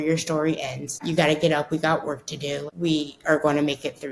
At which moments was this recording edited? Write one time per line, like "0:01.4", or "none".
0:01.0
0:02.7